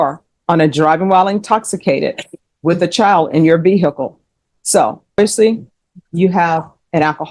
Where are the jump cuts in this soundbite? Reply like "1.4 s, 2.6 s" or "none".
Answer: 5.2 s